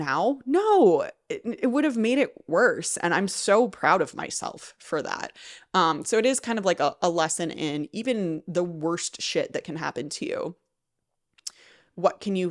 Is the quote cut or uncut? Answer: uncut